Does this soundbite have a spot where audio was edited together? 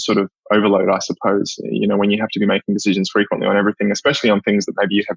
no; 0 cuts

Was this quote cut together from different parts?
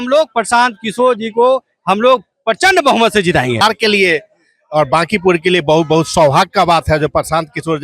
yes; 1 cut; at 3.6 s

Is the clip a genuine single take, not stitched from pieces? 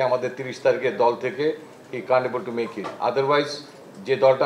yes; 0 cuts

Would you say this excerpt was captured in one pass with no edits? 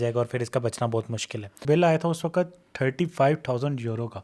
no; 1 cut; at 1.6 s

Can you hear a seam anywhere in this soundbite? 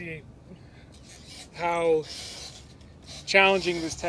no; 0 cuts

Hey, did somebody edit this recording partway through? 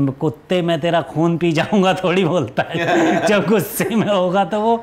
no; 0 cuts

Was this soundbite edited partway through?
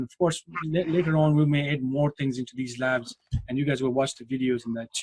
no; 0 cuts

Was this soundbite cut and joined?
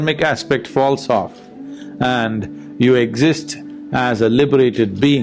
no; 0 cuts

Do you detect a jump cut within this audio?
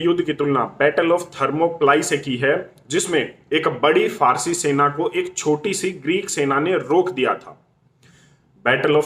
no; 0 cuts

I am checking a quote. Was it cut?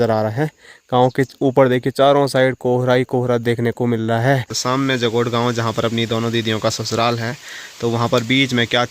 yes; 1 cut; at 4.6 s

